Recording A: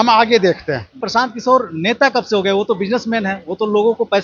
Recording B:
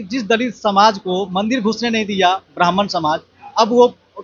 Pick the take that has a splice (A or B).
A